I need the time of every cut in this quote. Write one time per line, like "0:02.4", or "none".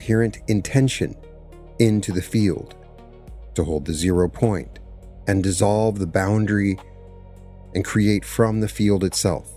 none